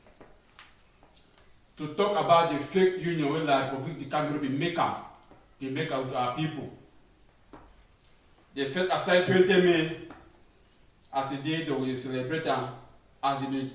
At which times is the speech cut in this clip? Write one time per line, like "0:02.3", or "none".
0:01.1